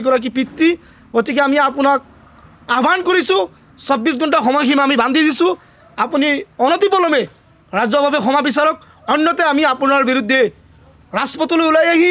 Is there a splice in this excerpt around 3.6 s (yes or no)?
no